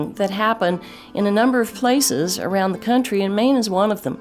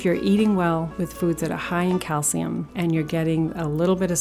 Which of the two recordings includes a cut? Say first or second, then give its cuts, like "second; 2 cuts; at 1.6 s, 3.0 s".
second; 2 cuts; at 0.9 s, 2.7 s